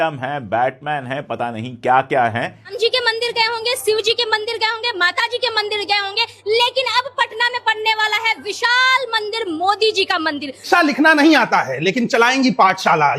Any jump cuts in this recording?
yes; 2 cuts; at 2.7 s, 10.6 s

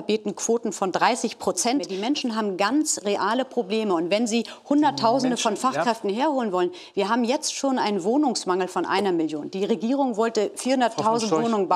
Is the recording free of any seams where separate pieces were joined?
no; 1 cut; at 1.9 s

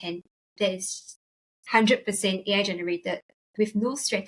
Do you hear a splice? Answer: no; 0 cuts

